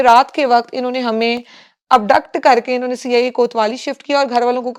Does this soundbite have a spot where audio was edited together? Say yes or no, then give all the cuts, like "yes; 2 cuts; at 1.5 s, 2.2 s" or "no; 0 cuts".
no; 0 cuts